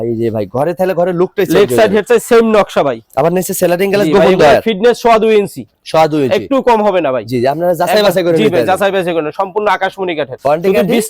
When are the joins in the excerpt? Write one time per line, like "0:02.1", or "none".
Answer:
none